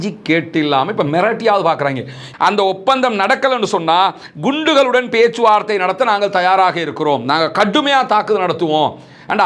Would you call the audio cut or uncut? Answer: cut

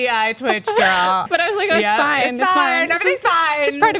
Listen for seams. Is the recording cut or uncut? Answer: cut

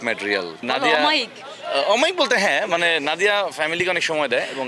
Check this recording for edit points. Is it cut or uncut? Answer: uncut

